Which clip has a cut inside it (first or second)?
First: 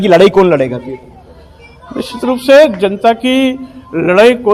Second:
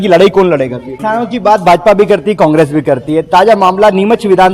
second